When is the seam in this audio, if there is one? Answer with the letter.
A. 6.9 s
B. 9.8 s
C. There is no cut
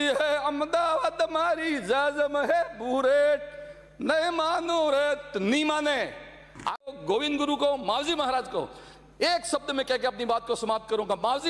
A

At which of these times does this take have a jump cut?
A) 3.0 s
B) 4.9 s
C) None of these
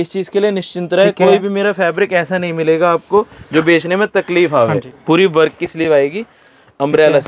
B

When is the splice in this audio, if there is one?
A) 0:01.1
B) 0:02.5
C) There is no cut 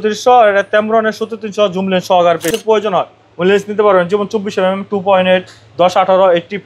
B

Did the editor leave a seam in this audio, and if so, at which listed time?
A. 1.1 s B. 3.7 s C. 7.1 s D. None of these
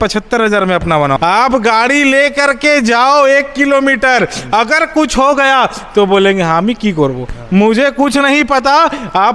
A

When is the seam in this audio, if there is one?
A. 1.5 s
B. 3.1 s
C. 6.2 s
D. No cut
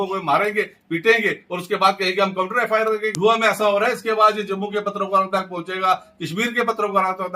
B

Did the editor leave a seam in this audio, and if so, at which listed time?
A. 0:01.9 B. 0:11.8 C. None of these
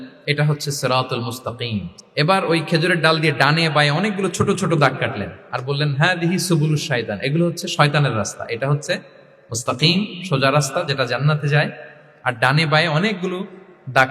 A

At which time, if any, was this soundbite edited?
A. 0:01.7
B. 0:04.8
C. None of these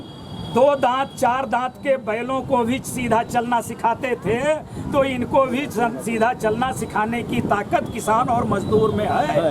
C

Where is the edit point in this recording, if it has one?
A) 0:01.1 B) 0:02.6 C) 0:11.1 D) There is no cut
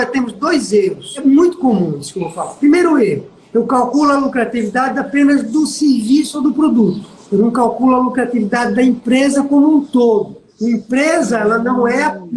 A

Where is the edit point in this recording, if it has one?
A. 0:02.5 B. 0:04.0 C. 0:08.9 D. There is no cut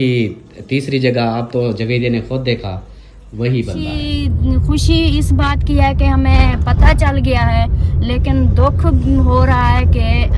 B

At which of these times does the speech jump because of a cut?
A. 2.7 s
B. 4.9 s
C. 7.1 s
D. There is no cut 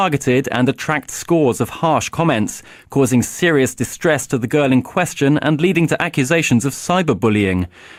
D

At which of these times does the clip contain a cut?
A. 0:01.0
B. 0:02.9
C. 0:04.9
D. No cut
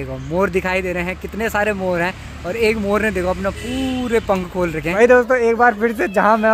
C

